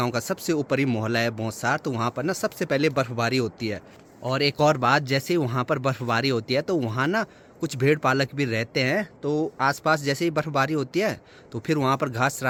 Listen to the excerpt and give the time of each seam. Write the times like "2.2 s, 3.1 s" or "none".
none

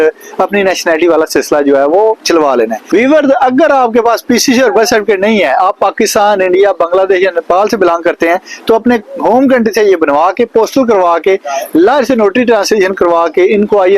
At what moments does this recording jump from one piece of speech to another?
none

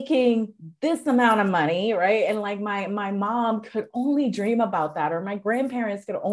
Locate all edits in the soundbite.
none

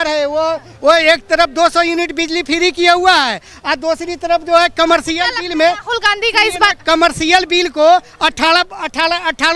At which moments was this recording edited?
none

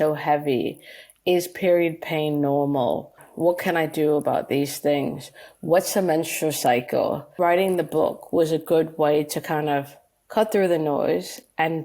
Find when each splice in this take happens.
3.2 s, 7.3 s

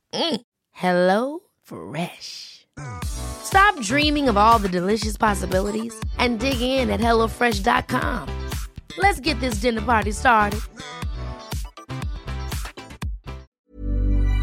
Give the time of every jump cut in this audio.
13.5 s

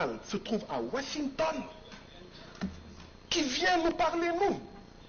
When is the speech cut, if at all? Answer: none

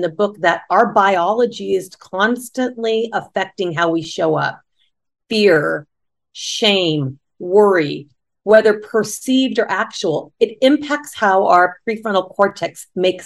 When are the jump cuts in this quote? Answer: none

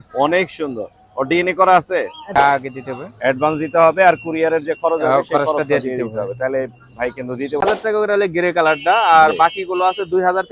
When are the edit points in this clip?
2.4 s, 7.6 s

